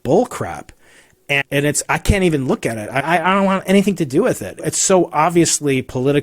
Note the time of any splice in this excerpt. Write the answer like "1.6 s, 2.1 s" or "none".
1.4 s, 3.0 s, 4.7 s